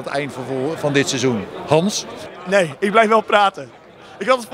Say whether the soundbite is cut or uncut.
cut